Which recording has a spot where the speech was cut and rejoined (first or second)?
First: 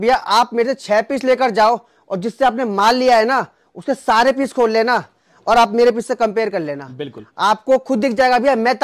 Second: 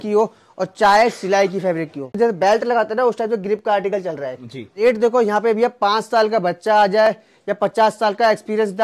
second